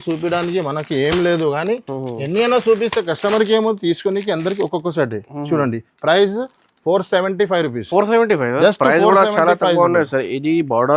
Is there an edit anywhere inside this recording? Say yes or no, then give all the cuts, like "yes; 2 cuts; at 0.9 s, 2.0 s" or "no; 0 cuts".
no; 0 cuts